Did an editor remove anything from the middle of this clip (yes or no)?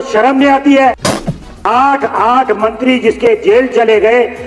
yes